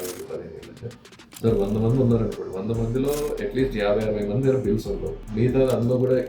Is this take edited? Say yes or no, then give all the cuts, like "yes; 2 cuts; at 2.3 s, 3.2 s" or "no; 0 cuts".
yes; 1 cut; at 5.2 s